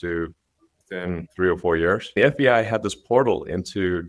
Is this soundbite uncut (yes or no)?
no